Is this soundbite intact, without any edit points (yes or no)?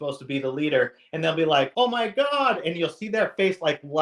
no